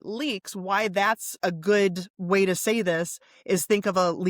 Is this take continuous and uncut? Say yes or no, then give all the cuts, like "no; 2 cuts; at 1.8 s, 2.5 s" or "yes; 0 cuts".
no; 1 cut; at 1.4 s